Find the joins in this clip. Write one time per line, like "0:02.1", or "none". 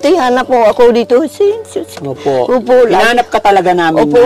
none